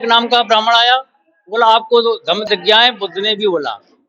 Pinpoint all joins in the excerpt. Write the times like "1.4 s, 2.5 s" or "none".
2.4 s